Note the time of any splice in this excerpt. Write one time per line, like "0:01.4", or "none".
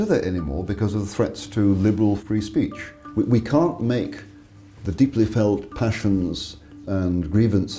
0:02.8
0:06.8